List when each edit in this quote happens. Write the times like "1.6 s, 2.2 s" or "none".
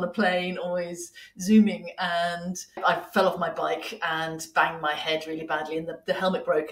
2.8 s